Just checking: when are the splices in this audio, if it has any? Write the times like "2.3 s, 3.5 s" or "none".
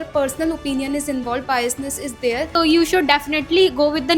2.5 s

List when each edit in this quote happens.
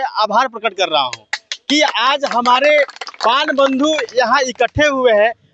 none

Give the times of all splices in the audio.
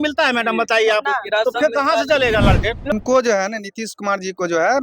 2.9 s

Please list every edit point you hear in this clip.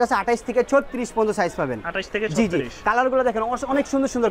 none

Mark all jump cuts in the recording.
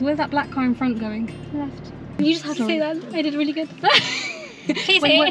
2.1 s

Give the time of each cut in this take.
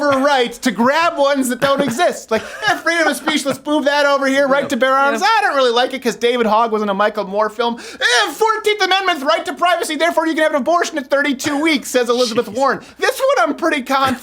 none

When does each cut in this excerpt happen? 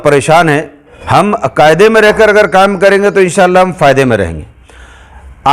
1.0 s

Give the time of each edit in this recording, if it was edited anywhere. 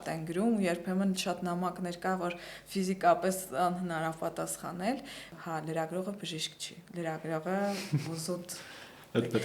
5.2 s

